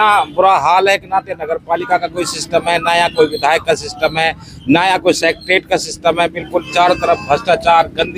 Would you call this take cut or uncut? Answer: uncut